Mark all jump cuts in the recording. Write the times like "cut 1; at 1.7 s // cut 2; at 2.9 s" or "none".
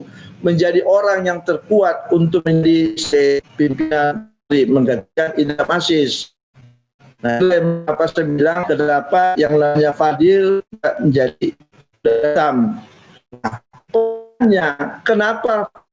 cut 1; at 8.6 s